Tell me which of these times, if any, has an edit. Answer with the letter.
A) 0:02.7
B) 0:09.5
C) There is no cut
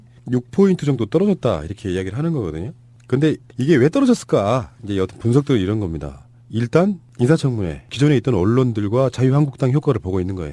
C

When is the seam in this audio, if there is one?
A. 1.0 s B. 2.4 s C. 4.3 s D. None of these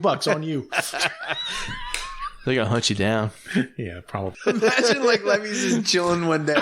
C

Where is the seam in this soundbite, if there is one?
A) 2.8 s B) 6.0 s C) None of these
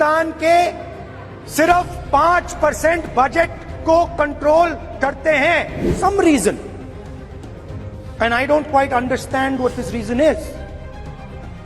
B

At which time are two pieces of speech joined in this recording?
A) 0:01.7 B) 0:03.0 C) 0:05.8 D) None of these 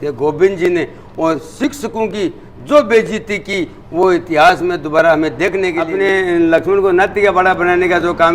C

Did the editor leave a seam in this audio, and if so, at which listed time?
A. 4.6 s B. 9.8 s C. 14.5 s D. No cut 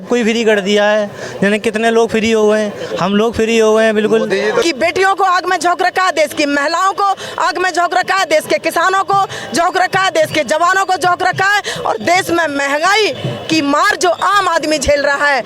A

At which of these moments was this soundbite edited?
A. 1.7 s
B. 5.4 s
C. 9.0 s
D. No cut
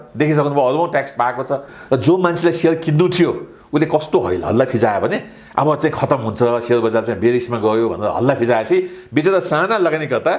A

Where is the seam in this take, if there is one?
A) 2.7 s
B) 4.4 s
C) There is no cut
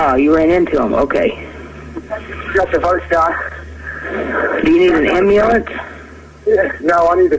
B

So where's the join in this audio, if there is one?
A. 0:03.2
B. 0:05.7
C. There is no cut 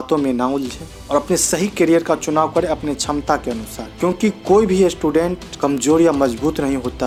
C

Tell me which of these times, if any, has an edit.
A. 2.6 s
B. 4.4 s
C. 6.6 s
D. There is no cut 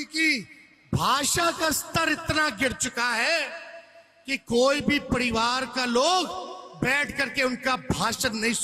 D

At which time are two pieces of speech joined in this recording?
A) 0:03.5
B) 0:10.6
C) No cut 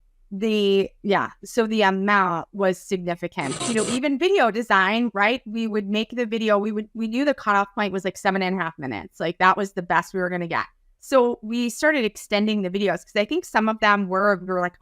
A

